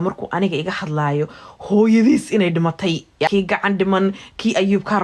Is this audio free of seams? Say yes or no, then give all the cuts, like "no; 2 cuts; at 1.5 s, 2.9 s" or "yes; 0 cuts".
no; 1 cut; at 3.1 s